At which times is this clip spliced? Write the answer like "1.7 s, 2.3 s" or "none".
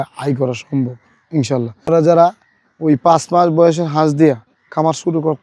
1.8 s